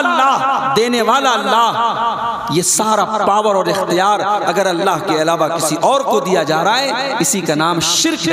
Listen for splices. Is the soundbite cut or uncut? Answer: uncut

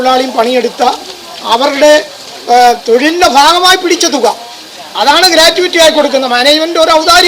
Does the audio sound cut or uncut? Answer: uncut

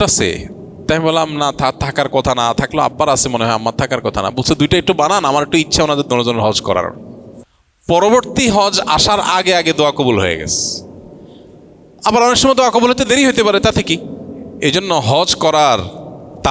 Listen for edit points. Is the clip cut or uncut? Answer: uncut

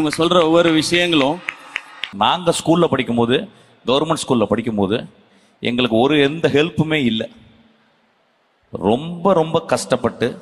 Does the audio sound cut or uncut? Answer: cut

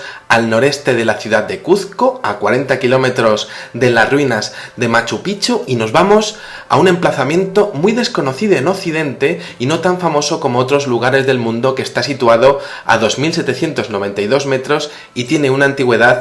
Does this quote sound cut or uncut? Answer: cut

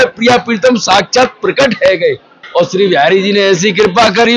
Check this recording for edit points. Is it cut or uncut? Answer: cut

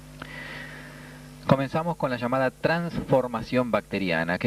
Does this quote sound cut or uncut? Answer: cut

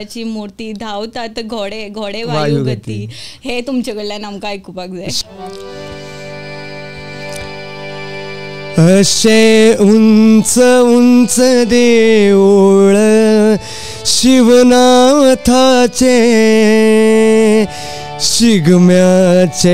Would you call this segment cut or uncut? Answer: uncut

